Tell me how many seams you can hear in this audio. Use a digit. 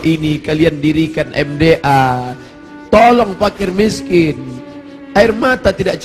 0